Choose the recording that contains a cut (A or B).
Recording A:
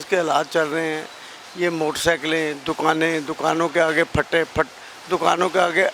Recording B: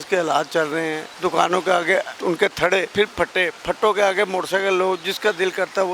B